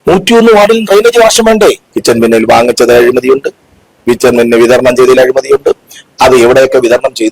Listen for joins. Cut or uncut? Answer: cut